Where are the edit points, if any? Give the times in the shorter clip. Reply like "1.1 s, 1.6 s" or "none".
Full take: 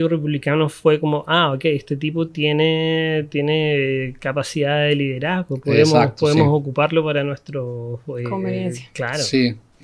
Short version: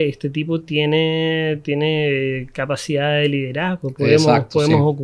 none